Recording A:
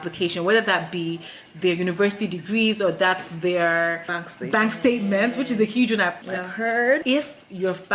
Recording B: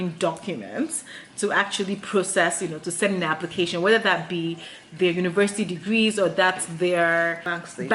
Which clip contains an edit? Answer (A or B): A